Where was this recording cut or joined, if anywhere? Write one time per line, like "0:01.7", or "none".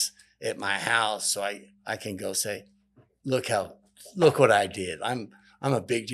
0:01.7